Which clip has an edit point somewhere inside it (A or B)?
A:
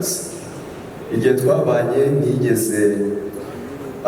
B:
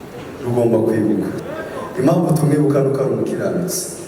B